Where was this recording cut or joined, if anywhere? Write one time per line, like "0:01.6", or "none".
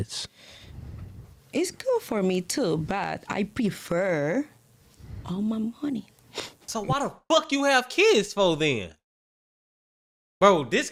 none